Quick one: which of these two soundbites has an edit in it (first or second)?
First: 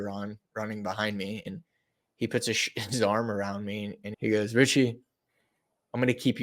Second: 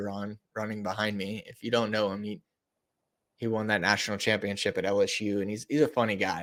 first